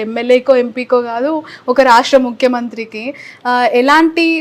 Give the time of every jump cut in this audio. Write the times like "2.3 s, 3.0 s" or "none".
none